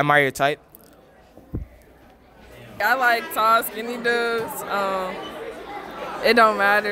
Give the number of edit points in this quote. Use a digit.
1